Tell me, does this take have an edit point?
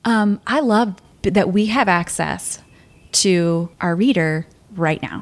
yes; 2 cuts; at 1.1 s, 3.7 s

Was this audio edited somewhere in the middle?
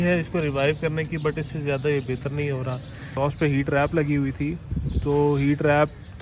yes; 1 cut; at 3.1 s

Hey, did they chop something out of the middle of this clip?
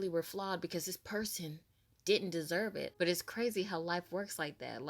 yes; 1 cut; at 2.9 s

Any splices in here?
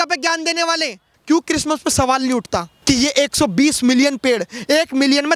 yes; 2 cuts; at 1.1 s, 2.7 s

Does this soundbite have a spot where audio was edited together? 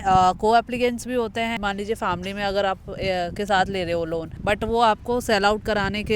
yes; 2 cuts; at 1.6 s, 4.3 s

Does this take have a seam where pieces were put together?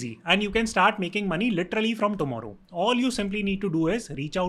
no; 0 cuts

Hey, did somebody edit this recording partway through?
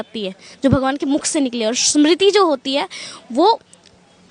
no; 0 cuts

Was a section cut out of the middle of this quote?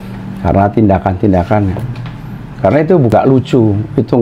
yes; 1 cut; at 3.1 s

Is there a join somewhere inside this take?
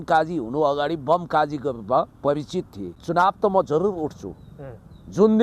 yes; 1 cut; at 3.0 s

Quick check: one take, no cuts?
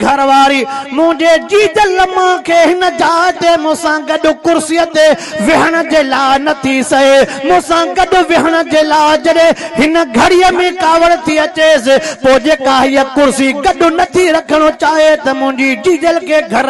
yes; 0 cuts

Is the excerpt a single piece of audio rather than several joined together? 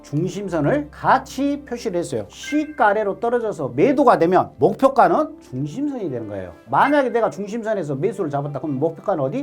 no; 2 cuts; at 2.3 s, 6.6 s

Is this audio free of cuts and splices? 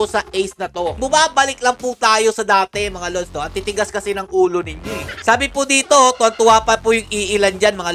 no; 2 cuts; at 1.0 s, 5.1 s

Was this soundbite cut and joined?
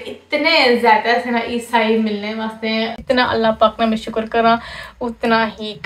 yes; 1 cut; at 2.9 s

